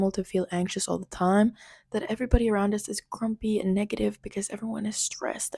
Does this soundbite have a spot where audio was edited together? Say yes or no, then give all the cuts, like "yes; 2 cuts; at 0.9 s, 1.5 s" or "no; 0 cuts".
no; 0 cuts